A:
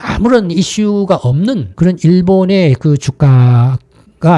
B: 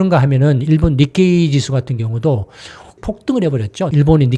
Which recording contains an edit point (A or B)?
B